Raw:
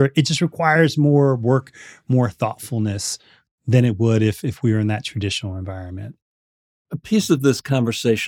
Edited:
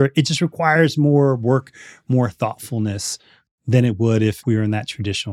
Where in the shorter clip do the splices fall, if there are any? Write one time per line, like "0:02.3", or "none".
0:04.4